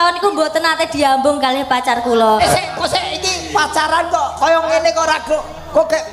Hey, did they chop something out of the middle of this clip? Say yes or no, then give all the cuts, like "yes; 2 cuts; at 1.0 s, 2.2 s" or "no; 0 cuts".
yes; 1 cut; at 2.4 s